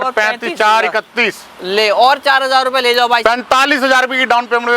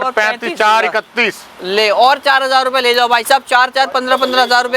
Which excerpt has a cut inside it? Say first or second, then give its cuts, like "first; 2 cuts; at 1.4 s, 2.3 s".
first; 1 cut; at 3.2 s